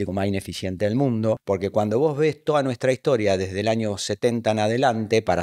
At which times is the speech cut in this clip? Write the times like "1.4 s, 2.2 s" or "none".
1.4 s